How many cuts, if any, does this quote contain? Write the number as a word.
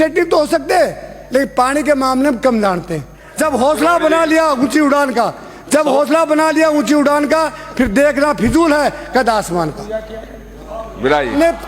one